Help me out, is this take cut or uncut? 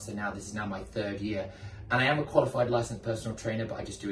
uncut